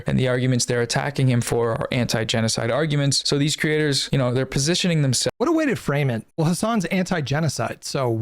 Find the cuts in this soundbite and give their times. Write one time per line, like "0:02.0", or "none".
0:05.3
0:06.3